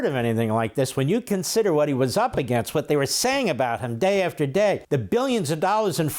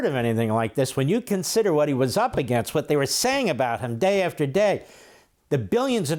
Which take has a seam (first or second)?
first